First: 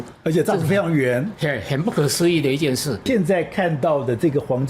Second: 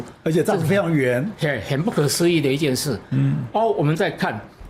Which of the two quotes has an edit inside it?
first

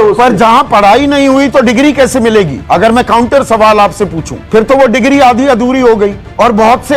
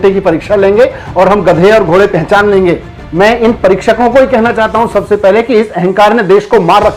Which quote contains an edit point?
first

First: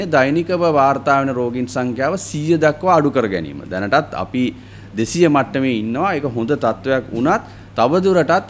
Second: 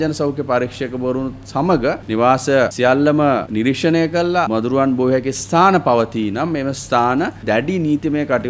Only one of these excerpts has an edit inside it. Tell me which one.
second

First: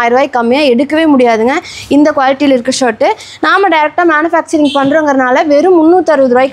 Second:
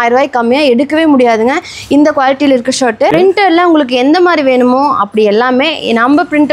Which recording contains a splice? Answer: second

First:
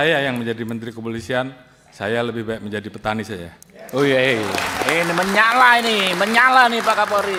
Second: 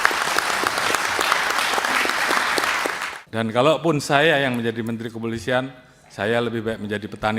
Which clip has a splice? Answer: second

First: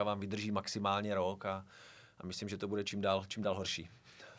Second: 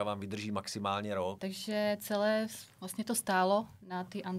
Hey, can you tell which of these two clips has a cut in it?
second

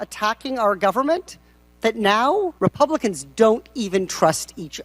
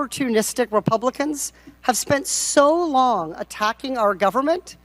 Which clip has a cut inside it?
first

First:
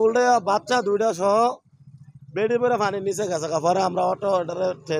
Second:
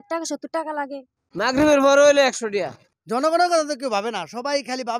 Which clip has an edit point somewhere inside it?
second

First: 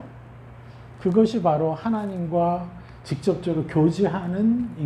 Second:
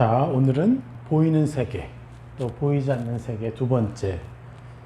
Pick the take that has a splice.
second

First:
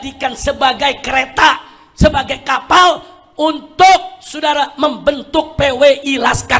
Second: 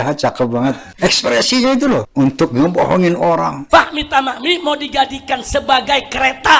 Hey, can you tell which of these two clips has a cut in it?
second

